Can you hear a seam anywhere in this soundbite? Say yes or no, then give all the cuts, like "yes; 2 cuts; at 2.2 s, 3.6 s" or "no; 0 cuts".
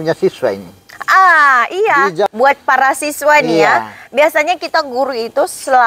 yes; 1 cut; at 2.3 s